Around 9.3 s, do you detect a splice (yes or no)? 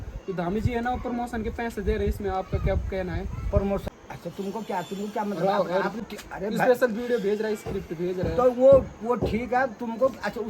no